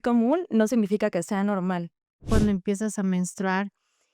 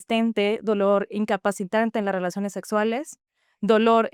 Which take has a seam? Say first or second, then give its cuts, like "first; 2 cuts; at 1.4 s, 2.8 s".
first; 1 cut; at 2.3 s